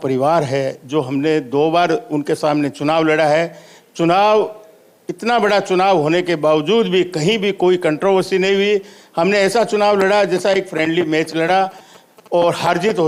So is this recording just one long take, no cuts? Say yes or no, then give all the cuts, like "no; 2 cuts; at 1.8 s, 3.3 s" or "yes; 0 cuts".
yes; 0 cuts